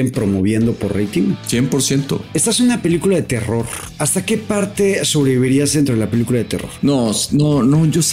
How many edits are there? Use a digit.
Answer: 4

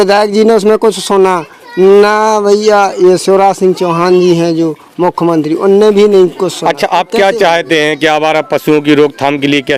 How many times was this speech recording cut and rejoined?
0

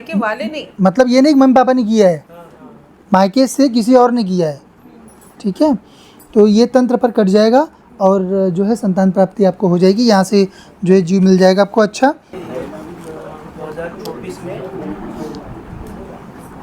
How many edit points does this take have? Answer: 1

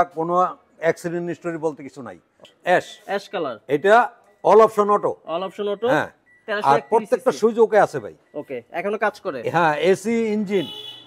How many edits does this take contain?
1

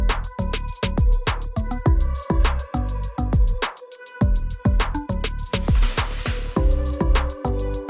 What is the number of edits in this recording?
1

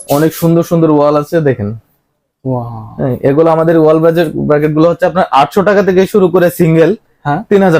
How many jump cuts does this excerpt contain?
0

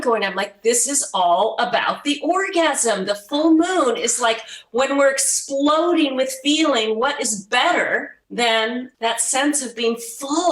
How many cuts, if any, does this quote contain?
2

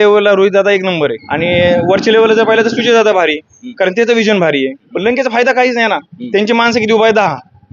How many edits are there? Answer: 2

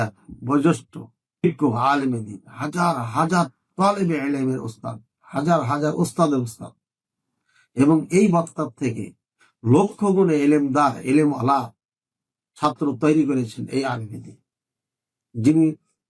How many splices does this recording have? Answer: 1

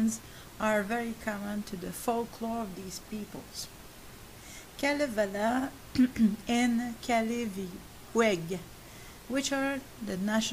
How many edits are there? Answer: 1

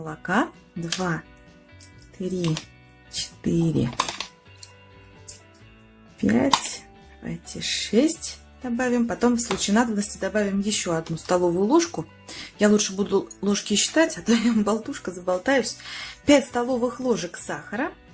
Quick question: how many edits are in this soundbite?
1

